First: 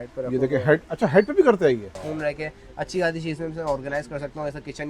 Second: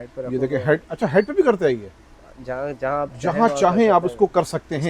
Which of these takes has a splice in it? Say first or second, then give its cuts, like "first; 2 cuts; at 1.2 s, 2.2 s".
first; 1 cut; at 2.0 s